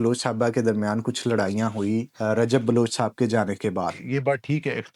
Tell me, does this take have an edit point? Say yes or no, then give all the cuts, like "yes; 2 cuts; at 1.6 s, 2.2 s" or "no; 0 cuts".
yes; 2 cuts; at 2.1 s, 4.0 s